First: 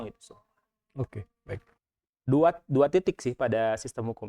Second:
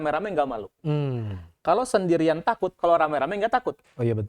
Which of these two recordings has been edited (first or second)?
first